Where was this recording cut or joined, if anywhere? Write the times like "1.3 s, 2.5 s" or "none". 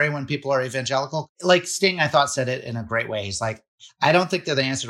1.3 s